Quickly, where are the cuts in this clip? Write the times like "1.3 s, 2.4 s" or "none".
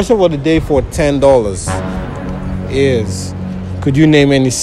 none